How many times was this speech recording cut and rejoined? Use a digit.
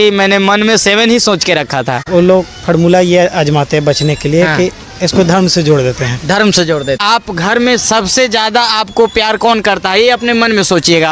2